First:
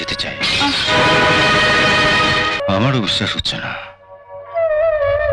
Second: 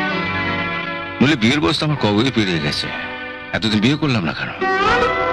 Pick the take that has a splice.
first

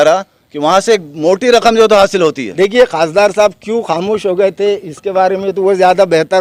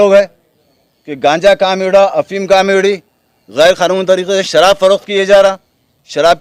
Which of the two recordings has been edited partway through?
first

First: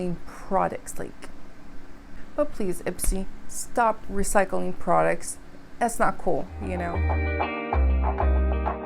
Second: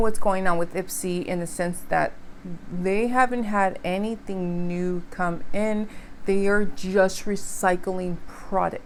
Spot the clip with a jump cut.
first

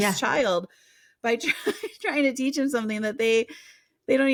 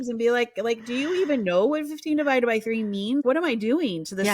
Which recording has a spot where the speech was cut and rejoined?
second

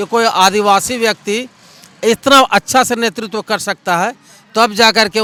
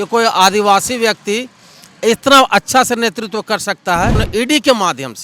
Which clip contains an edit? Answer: second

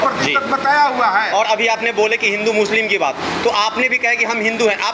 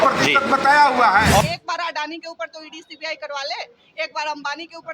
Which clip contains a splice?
second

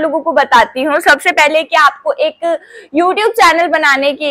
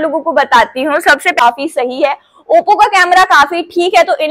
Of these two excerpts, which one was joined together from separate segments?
second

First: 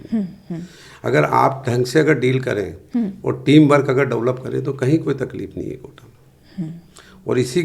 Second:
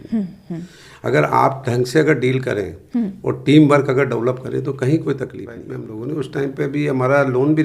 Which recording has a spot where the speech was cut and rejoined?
second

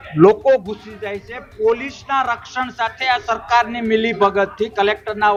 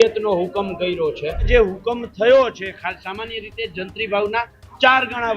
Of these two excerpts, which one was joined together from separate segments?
second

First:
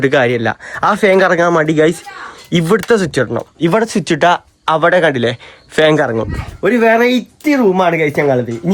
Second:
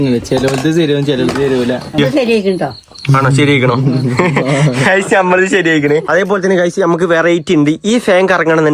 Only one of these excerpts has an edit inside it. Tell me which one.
second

